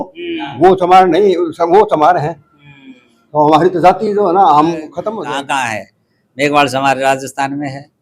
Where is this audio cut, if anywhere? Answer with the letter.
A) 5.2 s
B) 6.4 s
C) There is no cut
A